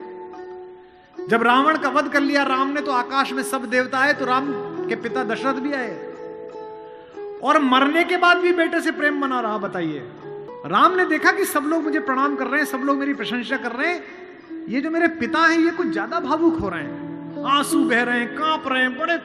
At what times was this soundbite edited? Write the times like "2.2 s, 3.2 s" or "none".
none